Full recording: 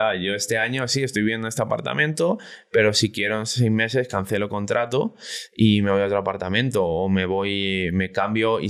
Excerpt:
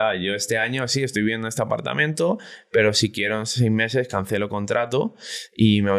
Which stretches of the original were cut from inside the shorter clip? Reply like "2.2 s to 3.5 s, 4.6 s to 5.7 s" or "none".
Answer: none